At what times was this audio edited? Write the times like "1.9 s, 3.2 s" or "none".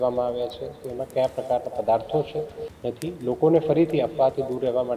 2.6 s

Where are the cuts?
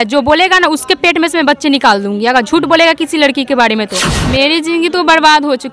4.1 s

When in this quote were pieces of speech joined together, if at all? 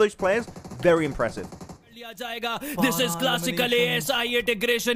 2.3 s

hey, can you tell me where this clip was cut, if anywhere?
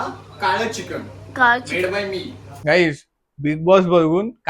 2.4 s

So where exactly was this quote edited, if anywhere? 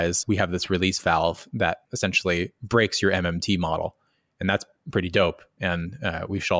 1.8 s

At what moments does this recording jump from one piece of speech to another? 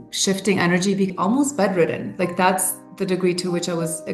1.1 s

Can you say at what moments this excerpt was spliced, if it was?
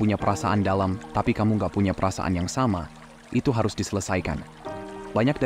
none

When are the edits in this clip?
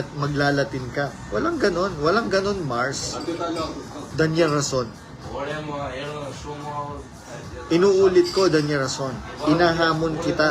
none

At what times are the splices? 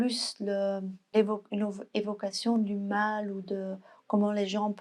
1.1 s

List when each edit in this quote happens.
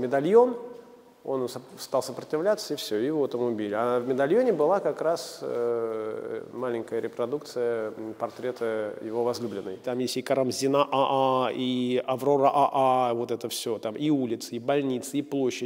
9.8 s

